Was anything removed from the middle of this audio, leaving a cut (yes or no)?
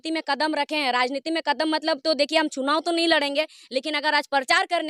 no